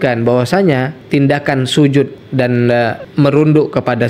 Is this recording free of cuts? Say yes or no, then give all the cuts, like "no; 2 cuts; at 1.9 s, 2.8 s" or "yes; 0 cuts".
no; 2 cuts; at 1.0 s, 2.6 s